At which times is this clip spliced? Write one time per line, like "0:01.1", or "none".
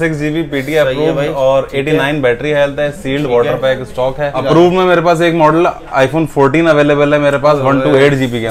0:04.4